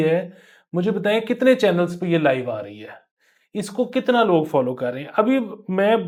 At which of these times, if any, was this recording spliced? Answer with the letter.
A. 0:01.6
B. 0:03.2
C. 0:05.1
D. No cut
D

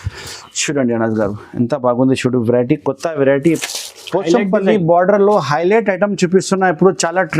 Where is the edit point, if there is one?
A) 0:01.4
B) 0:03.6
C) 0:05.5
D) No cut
B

